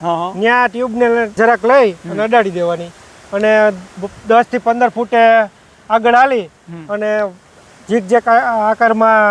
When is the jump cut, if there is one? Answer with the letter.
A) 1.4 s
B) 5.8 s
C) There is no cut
A